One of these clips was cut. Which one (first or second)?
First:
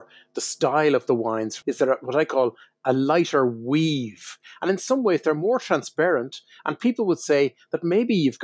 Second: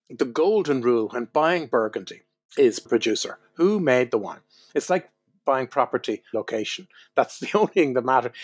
first